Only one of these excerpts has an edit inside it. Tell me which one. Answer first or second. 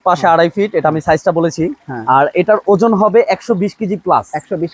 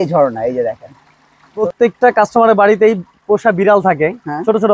second